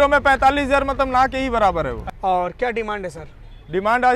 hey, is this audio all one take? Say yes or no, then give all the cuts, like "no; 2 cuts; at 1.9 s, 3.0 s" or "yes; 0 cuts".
no; 1 cut; at 2.0 s